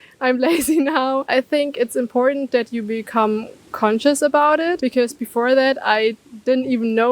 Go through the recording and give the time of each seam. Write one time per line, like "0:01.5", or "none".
0:01.3
0:04.8